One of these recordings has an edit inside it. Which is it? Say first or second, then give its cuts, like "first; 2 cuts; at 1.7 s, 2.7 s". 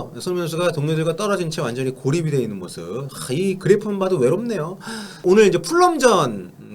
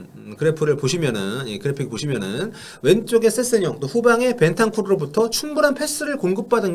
first; 1 cut; at 5.2 s